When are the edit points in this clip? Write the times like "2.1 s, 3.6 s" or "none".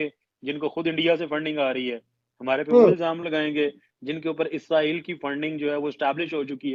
none